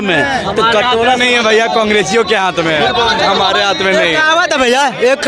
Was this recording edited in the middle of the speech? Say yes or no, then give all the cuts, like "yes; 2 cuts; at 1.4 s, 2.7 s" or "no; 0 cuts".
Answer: no; 0 cuts